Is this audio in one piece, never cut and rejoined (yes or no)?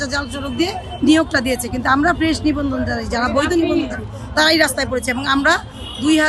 yes